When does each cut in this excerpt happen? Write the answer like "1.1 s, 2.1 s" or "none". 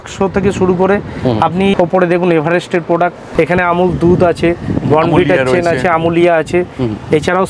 1.7 s, 3.2 s

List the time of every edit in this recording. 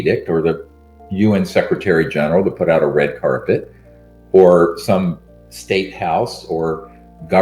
none

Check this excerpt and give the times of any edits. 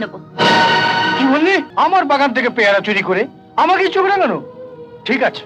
1.7 s

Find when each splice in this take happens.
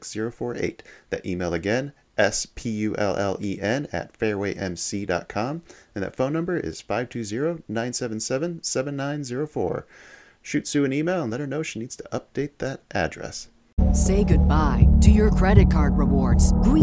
13.7 s

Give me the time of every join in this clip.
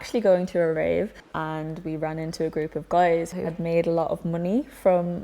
1.2 s, 3.4 s

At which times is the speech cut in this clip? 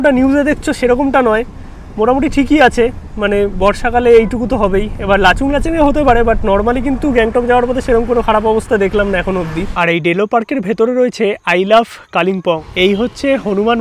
9.7 s, 12.6 s

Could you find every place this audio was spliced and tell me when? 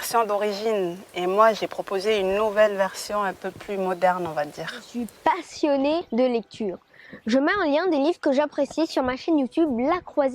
5.0 s

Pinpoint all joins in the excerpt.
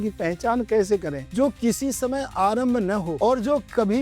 1.2 s, 3.2 s

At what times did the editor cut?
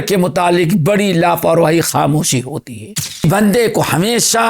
3.2 s

